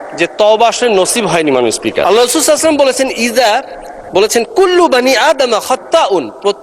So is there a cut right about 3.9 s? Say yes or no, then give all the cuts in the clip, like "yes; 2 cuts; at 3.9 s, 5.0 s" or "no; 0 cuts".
no; 1 cut; at 2.0 s